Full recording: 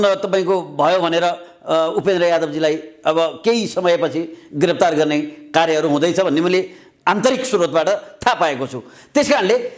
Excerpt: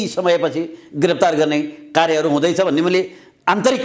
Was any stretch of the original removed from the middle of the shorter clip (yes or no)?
no